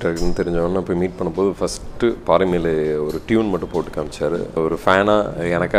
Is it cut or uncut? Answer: cut